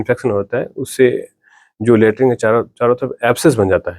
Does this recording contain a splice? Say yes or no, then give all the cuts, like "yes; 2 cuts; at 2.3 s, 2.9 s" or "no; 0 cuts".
no; 0 cuts